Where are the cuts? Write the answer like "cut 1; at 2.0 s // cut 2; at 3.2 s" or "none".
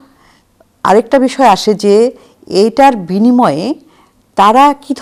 none